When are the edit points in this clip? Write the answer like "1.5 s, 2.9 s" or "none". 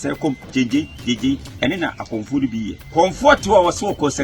2.8 s